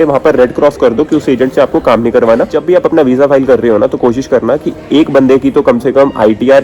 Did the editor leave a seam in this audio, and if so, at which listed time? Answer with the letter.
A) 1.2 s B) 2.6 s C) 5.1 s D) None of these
B